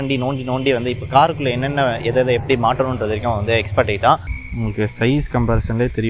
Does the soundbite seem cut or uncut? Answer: cut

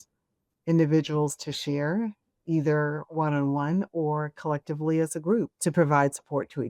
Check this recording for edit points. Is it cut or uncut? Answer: cut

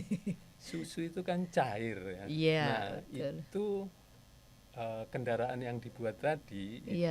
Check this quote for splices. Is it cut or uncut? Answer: uncut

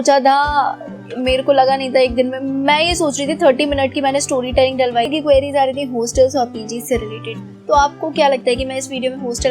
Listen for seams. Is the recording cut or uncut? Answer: cut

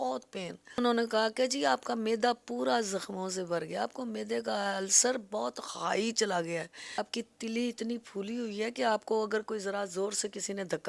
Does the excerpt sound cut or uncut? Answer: cut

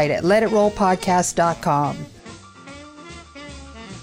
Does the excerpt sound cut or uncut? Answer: cut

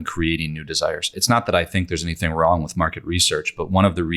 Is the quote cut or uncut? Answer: cut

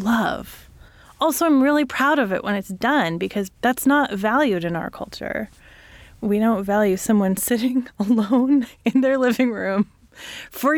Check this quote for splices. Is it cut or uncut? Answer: cut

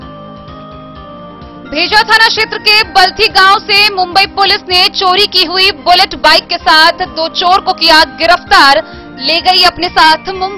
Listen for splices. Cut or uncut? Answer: cut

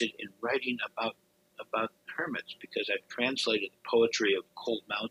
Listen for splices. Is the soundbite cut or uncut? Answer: uncut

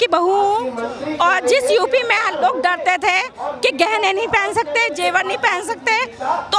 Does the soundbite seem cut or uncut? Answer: uncut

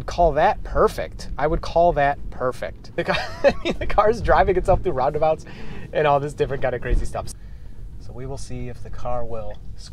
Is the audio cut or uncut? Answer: cut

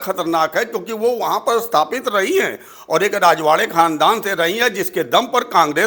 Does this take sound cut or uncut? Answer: uncut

